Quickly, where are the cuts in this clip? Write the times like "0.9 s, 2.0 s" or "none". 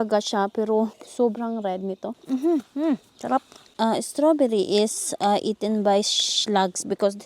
1.0 s, 2.2 s, 3.6 s

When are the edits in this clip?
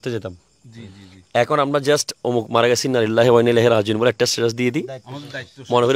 none

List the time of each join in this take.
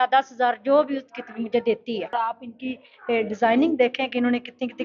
2.2 s

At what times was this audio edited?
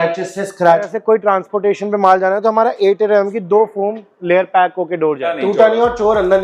0.9 s, 5.3 s

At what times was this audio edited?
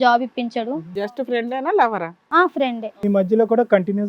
1.0 s

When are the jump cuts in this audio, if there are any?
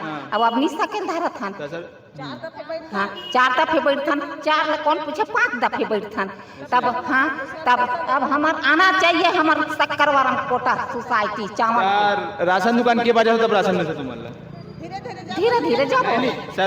none

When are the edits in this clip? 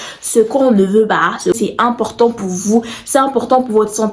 1.5 s

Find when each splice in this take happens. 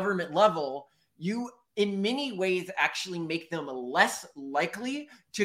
none

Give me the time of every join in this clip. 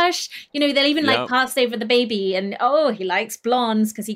1.5 s

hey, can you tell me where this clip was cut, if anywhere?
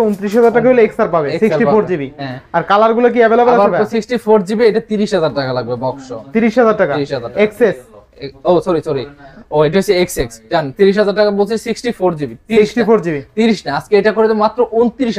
none

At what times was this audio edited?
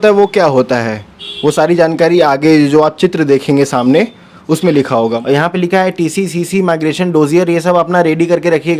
5.2 s

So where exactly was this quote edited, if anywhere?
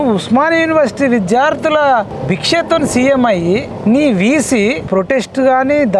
2.1 s, 3.7 s, 4.9 s

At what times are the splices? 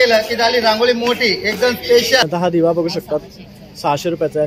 2.2 s

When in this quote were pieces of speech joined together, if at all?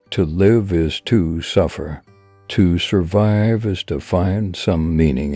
none

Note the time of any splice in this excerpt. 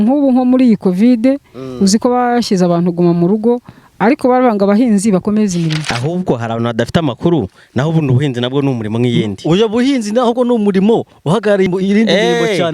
5.9 s, 11.7 s

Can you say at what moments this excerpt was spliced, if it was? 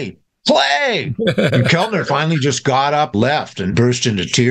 3.5 s

